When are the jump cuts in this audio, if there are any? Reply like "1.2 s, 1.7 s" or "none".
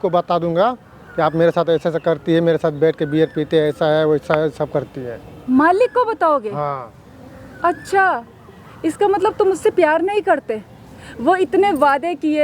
none